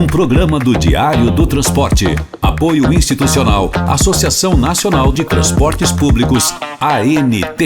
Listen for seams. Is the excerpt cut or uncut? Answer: uncut